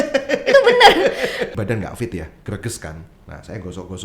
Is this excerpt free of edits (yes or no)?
no